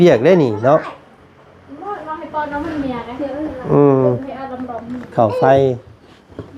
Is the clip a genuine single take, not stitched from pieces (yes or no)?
no